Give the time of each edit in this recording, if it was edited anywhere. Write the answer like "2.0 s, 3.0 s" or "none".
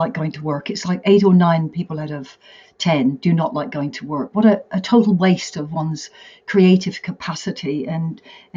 none